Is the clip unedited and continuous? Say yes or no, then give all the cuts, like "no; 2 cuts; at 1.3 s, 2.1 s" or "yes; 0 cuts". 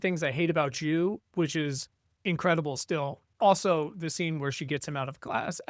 no; 1 cut; at 3.2 s